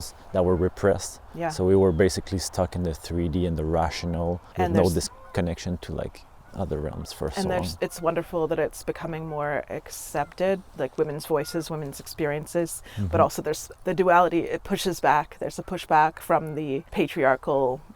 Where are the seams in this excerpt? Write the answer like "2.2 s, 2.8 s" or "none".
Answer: 4.4 s, 13.7 s, 16.9 s